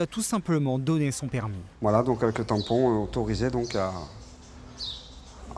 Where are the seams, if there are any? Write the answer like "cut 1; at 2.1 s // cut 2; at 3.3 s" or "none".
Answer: cut 1; at 1.6 s